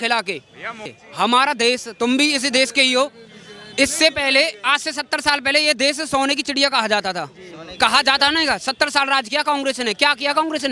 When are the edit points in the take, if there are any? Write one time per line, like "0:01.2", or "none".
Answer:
0:00.9